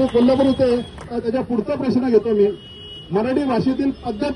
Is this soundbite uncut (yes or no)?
no